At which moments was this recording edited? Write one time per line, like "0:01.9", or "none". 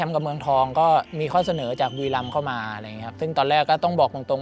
none